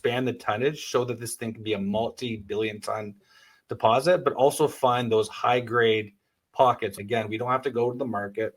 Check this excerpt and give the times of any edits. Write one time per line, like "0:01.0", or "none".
0:06.9